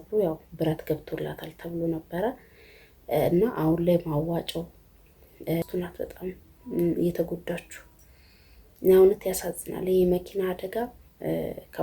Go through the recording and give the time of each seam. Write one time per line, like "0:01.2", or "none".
0:05.6